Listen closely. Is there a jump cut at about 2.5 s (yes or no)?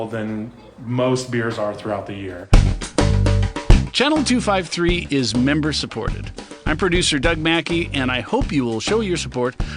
yes